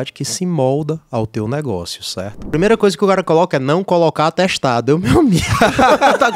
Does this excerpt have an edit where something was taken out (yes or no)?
yes